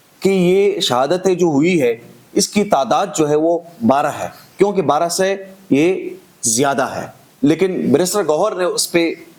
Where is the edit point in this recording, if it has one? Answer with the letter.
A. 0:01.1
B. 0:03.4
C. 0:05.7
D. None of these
D